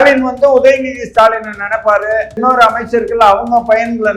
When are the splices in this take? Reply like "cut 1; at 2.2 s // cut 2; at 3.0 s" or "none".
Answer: cut 1; at 2.4 s